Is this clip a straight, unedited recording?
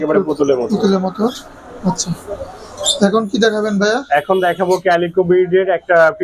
yes; 0 cuts

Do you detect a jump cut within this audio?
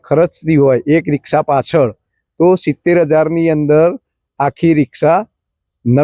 no; 0 cuts

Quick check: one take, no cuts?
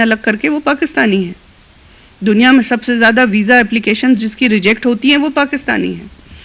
yes; 0 cuts

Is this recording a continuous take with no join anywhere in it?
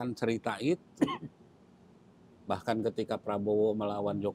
yes; 0 cuts

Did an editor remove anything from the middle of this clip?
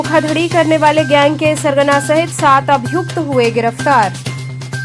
no; 0 cuts

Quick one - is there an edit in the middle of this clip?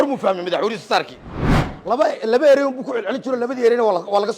yes; 1 cut; at 1.7 s

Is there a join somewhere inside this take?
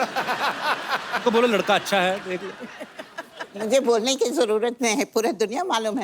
no; 0 cuts

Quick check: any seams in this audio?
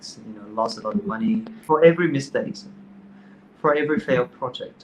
yes; 1 cut; at 1.5 s

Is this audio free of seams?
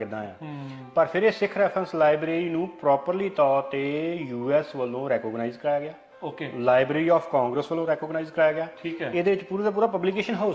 yes; 0 cuts

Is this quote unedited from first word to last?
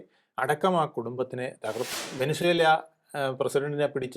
no; 1 cut; at 1.9 s

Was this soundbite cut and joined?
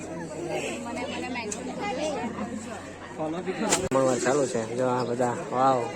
yes; 1 cut; at 3.9 s

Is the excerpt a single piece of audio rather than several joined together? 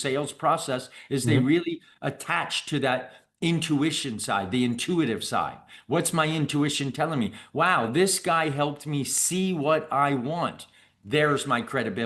yes; 0 cuts

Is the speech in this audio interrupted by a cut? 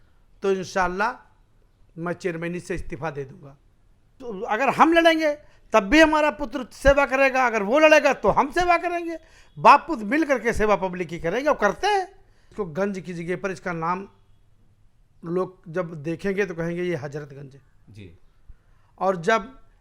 yes; 2 cuts; at 4.1 s, 12.5 s

